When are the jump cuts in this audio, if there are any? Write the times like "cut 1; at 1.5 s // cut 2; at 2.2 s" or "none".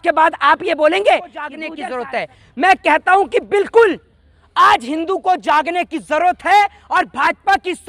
cut 1; at 1.7 s